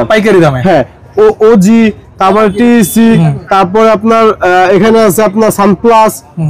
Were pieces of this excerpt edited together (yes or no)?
no